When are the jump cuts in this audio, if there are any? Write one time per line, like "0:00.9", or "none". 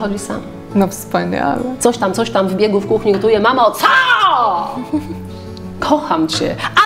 0:01.7